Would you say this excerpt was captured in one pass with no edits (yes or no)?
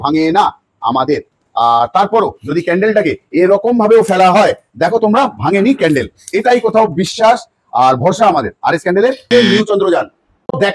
no